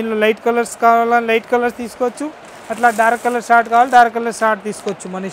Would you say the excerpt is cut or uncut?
uncut